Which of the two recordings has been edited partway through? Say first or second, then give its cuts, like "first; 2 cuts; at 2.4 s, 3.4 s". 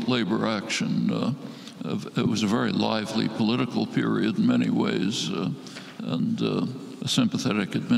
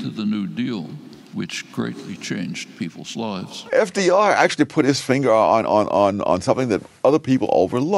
second; 1 cut; at 3.7 s